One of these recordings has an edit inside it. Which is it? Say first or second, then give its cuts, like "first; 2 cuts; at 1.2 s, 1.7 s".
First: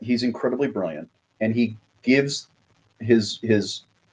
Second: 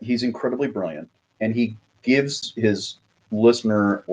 second; 1 cut; at 2.5 s